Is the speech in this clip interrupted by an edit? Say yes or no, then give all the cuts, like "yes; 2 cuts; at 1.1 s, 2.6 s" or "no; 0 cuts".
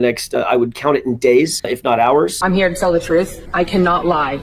yes; 2 cuts; at 1.6 s, 2.4 s